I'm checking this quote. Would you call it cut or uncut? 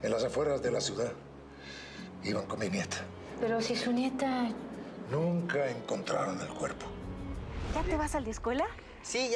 cut